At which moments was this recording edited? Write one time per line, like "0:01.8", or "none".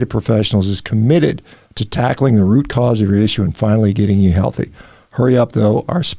none